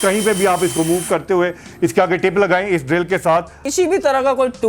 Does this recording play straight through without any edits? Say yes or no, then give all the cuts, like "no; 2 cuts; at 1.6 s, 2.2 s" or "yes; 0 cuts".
no; 1 cut; at 3.6 s